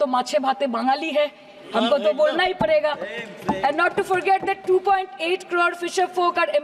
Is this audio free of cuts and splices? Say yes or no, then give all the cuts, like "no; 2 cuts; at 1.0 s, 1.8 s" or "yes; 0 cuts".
yes; 0 cuts